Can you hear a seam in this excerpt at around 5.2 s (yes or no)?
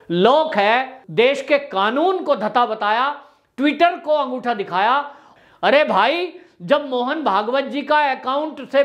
yes